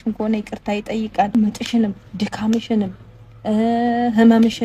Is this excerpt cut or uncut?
cut